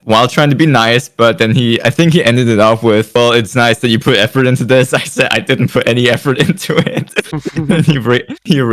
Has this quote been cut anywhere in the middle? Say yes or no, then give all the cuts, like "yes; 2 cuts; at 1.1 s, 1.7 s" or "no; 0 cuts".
no; 0 cuts